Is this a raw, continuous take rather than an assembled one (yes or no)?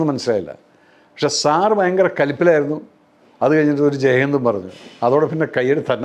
yes